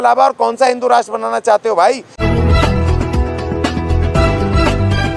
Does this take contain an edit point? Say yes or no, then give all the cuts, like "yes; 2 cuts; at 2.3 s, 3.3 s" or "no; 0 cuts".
yes; 1 cut; at 2.1 s